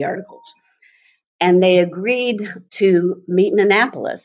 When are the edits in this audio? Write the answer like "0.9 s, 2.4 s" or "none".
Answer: none